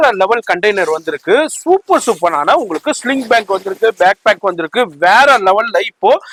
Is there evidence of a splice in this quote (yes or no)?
no